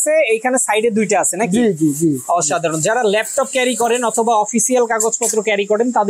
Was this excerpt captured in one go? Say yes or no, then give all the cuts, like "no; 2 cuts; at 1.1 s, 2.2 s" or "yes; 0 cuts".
yes; 0 cuts